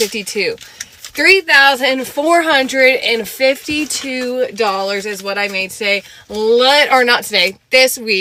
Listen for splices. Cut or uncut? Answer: uncut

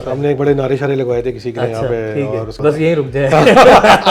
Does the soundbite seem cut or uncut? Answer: cut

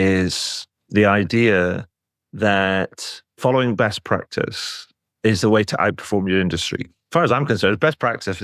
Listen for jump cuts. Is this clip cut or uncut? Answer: uncut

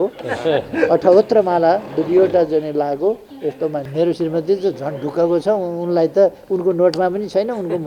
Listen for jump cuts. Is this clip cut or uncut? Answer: cut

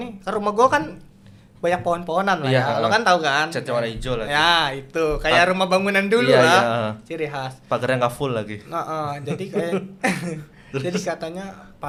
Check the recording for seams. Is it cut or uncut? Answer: uncut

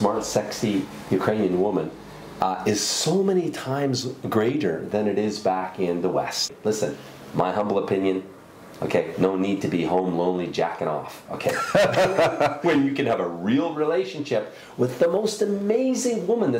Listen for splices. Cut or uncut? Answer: cut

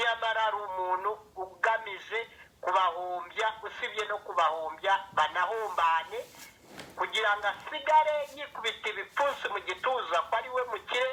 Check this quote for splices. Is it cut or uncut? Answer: uncut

